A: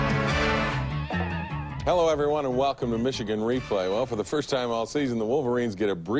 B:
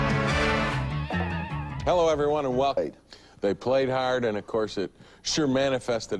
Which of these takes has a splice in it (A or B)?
A